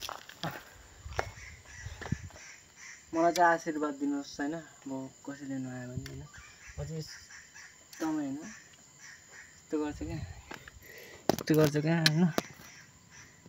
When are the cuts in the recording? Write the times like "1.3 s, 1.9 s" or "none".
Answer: none